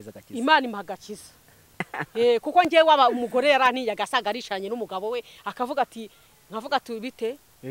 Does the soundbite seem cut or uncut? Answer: cut